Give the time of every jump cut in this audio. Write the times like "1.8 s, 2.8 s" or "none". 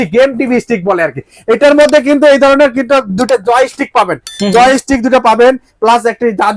none